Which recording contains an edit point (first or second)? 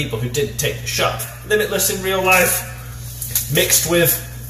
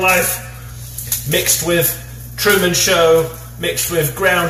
first